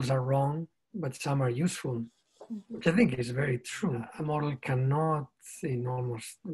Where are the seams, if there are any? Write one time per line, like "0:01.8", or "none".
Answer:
0:04.1